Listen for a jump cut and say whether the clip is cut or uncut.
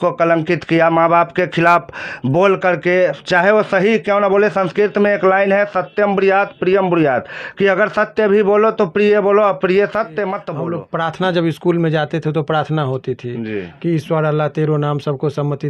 cut